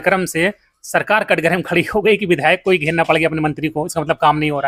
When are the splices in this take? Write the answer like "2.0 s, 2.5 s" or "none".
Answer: none